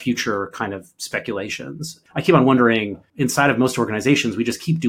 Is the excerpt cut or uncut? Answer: cut